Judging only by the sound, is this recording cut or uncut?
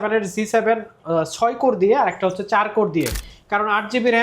cut